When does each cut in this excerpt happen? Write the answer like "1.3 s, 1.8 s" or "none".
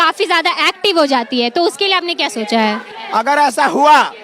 2.9 s